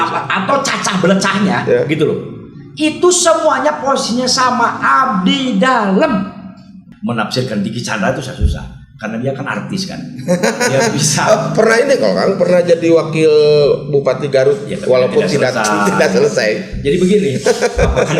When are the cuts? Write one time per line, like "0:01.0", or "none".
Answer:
0:06.8